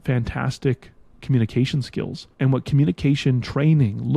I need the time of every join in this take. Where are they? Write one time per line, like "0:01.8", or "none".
0:02.2